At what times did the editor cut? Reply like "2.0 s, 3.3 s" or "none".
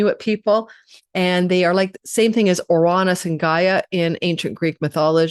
none